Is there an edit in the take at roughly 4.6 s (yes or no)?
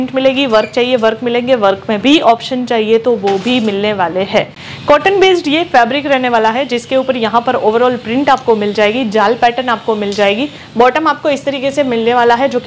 yes